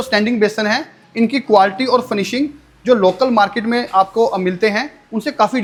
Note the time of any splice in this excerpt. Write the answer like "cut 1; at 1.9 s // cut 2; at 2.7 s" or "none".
none